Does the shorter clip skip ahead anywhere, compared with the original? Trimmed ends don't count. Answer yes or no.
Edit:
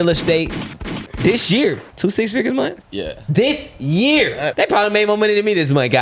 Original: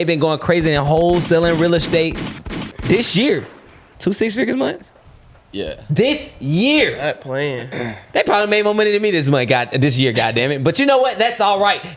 yes